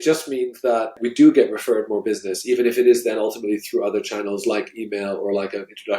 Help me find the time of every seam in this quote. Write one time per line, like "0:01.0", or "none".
0:01.0